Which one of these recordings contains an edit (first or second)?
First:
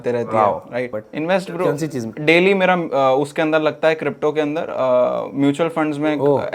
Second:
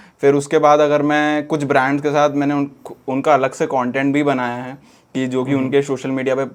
first